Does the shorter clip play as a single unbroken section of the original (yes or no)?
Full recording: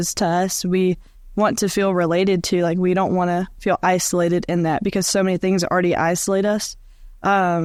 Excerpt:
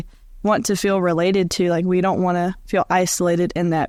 yes